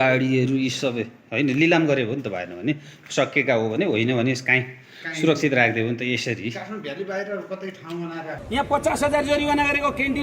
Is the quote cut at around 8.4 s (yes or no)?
yes